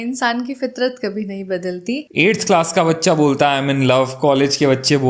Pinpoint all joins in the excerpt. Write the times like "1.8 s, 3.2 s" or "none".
2.1 s